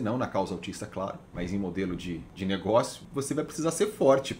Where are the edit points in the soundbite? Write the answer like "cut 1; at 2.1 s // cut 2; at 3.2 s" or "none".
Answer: cut 1; at 2.3 s // cut 2; at 3.0 s